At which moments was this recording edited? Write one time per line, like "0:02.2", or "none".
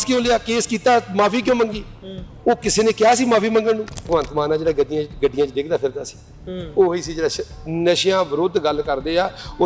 0:04.1